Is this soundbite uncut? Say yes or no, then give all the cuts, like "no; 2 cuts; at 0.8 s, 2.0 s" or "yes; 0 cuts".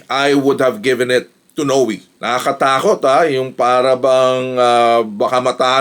no; 1 cut; at 2.1 s